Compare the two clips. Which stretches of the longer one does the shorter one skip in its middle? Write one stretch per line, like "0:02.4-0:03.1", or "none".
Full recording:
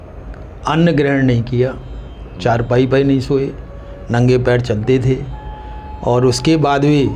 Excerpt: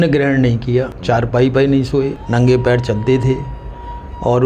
0:01.8-0:02.3
0:03.6-0:04.0